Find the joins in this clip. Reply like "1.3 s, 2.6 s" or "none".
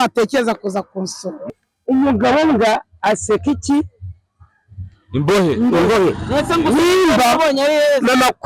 1.6 s